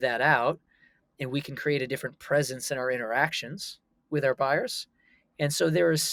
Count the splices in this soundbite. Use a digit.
0